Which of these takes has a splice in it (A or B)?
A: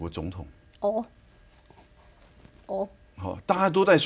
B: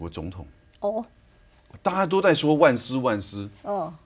B